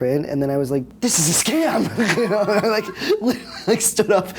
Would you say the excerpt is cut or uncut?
cut